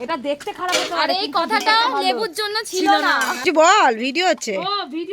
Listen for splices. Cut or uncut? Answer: cut